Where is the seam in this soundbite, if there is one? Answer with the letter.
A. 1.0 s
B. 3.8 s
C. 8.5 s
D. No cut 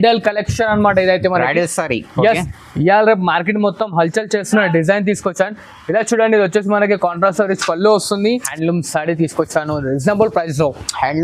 C